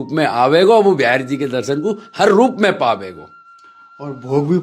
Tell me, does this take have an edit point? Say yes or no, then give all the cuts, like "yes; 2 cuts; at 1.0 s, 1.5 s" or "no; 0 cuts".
no; 0 cuts